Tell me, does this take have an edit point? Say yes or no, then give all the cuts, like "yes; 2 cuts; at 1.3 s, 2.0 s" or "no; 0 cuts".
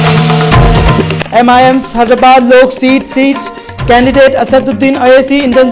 no; 0 cuts